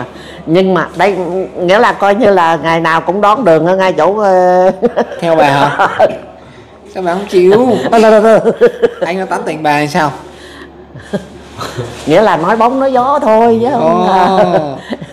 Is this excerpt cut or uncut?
uncut